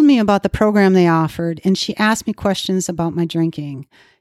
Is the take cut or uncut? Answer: uncut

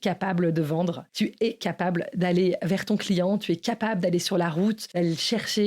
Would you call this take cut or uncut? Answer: cut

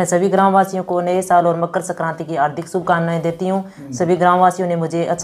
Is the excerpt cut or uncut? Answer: uncut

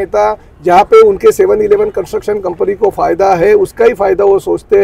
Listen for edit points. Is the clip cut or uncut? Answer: uncut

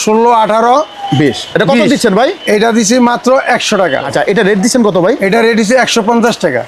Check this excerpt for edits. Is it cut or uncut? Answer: cut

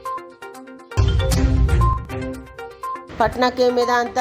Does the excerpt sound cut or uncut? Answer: cut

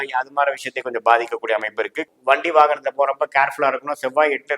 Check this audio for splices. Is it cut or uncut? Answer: cut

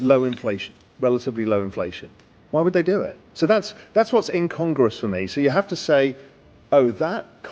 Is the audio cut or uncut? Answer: cut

